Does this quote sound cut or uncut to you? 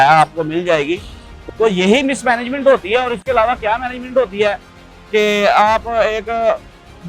cut